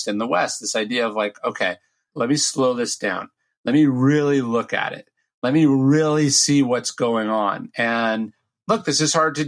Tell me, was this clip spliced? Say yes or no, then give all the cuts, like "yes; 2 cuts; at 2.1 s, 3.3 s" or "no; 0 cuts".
yes; 1 cut; at 2.0 s